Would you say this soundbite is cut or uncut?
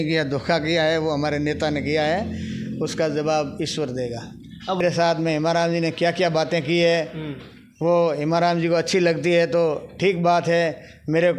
cut